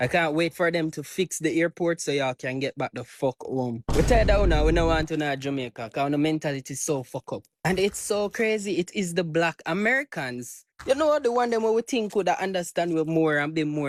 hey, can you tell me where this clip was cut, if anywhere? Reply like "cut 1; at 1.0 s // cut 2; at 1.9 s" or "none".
none